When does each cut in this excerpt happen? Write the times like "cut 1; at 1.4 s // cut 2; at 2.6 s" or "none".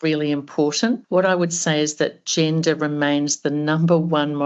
cut 1; at 1.0 s